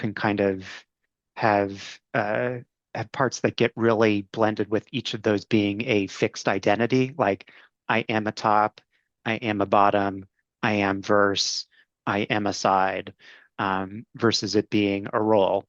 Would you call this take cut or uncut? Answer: uncut